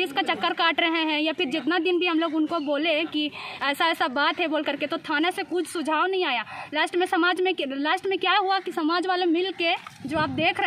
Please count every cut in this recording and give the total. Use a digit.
0